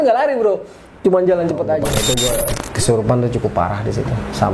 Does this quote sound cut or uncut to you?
cut